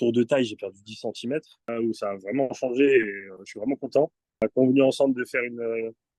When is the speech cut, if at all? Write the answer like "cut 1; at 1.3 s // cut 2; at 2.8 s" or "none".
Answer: cut 1; at 1.6 s // cut 2; at 4.5 s